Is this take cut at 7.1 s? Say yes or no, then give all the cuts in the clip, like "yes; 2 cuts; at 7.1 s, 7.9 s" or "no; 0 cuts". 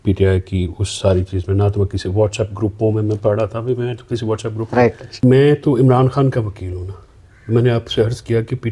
no; 1 cut; at 5.1 s